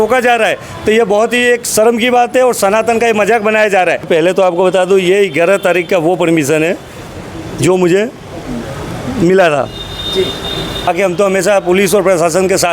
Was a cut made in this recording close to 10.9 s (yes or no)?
yes